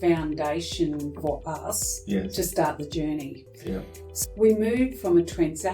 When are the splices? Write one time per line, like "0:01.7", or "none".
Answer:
0:04.1

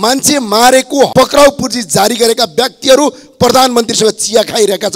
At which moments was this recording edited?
0:01.1

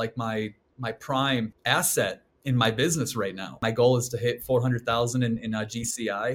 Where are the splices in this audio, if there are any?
0:01.6
0:03.6

